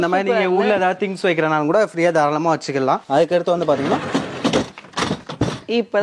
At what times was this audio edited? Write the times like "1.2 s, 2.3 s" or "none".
3.0 s